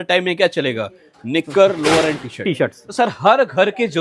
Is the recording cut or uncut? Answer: uncut